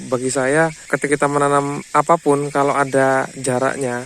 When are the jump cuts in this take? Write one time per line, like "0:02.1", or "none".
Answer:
0:01.1
0:01.8